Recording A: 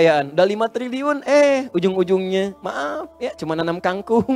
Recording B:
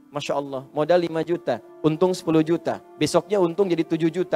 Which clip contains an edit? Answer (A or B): B